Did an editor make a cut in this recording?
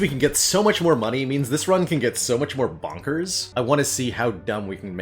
yes; 1 cut; at 3.4 s

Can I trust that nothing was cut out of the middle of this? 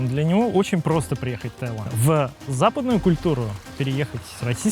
no; 1 cut; at 1.8 s

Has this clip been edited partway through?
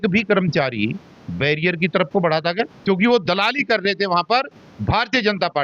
yes; 1 cut; at 2.7 s

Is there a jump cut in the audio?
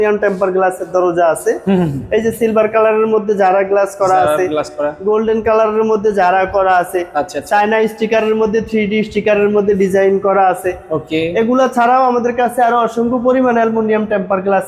no; 0 cuts

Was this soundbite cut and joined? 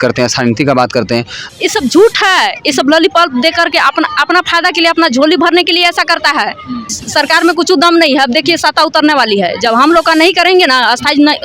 yes; 2 cuts; at 1.4 s, 7.0 s

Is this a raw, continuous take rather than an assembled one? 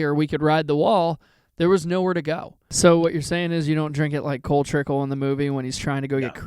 no; 1 cut; at 2.6 s

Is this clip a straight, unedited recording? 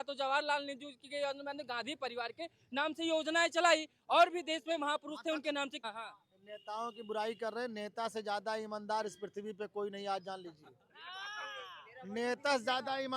no; 1 cut; at 5.8 s

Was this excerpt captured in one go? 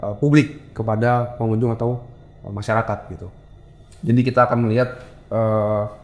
yes; 0 cuts

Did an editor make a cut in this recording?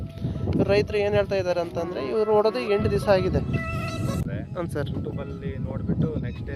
yes; 1 cut; at 4.2 s

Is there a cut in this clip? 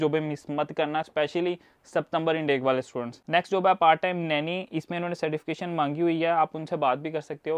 no; 0 cuts

